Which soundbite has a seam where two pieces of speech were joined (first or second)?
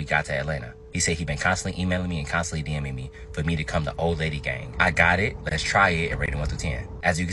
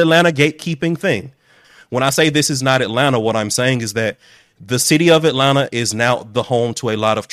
second